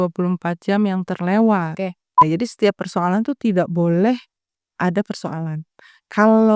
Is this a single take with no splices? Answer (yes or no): no